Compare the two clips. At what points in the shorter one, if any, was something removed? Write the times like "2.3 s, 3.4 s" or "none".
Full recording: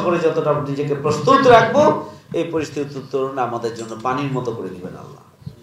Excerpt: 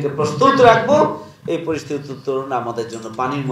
none